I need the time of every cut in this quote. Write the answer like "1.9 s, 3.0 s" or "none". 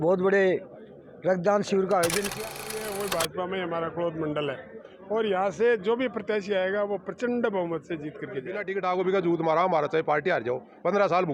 2.3 s, 8.6 s